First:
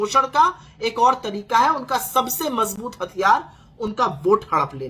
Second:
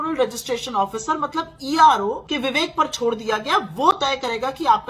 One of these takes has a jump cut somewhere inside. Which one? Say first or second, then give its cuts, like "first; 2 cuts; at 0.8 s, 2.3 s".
second; 1 cut; at 2.2 s